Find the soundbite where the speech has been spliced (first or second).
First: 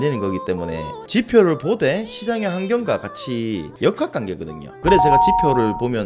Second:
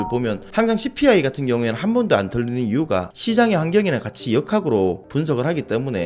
first